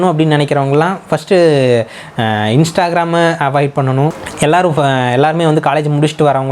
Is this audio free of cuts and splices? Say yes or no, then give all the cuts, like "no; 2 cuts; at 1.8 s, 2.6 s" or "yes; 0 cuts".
no; 1 cut; at 4.2 s